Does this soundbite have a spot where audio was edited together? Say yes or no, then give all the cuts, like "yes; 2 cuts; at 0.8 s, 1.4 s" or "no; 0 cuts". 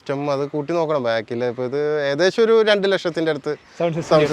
no; 0 cuts